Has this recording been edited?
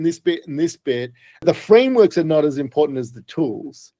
yes; 1 cut; at 1.4 s

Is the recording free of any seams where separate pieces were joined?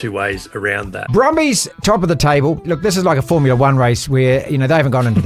no; 3 cuts; at 1.0 s, 1.7 s, 2.6 s

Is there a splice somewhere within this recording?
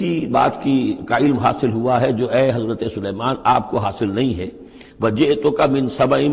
no; 0 cuts

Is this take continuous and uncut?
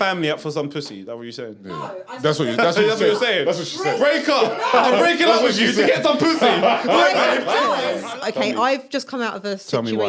no; 1 cut; at 7.9 s

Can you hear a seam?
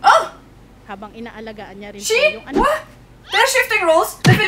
no; 0 cuts

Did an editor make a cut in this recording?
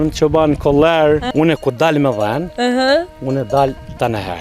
yes; 1 cut; at 1.3 s

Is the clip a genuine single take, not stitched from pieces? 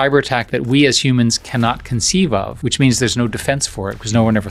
yes; 0 cuts

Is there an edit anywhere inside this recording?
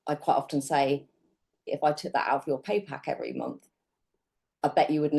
yes; 1 cut; at 1.7 s

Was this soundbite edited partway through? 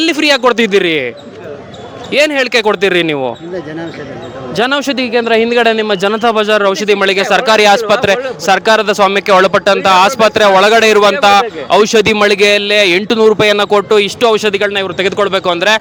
no; 0 cuts

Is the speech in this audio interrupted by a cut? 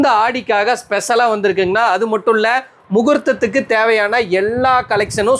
no; 0 cuts

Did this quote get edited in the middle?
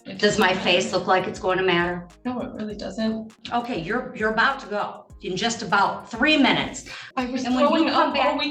yes; 3 cuts; at 2.1 s, 3.4 s, 7.0 s

